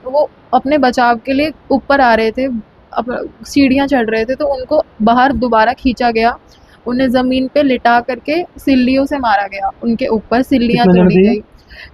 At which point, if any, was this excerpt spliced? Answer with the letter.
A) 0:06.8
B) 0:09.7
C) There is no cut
C